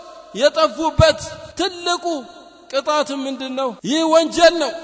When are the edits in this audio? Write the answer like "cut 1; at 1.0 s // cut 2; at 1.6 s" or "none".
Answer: cut 1; at 1.4 s // cut 2; at 3.8 s